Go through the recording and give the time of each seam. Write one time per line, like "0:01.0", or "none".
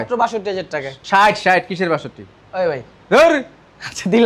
none